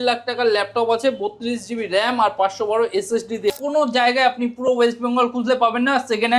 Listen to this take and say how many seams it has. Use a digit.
1